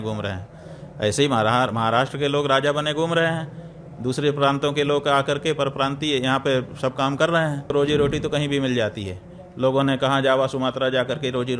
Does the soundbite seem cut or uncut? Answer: cut